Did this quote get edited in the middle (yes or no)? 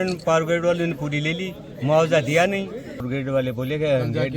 yes